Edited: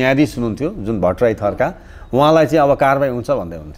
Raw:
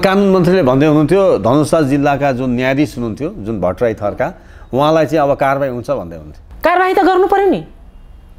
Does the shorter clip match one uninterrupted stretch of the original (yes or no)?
yes